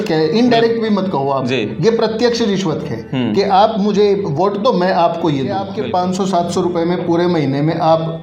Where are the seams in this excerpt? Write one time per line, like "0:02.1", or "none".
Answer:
0:05.8